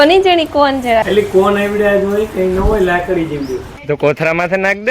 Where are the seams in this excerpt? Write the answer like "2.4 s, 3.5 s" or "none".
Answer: 1.1 s, 3.7 s